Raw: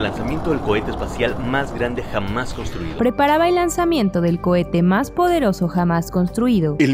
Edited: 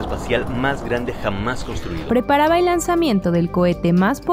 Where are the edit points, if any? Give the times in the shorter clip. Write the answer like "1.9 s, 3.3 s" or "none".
none